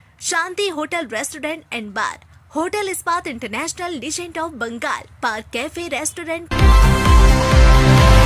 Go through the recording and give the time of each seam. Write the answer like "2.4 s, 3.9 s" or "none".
6.5 s